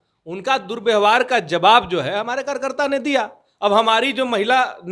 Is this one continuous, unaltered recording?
yes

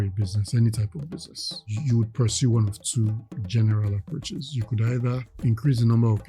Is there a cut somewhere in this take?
yes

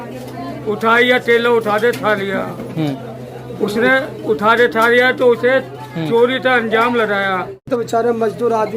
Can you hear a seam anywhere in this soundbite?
yes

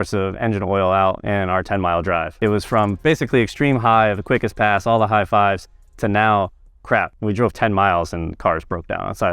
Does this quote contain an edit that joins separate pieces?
yes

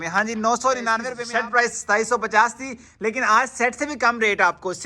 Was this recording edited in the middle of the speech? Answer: yes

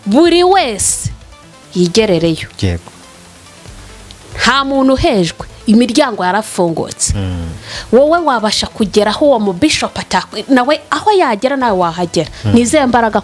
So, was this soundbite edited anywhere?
no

